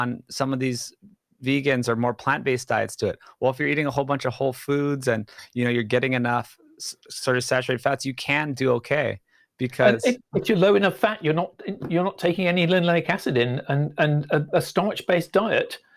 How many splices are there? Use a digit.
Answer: 1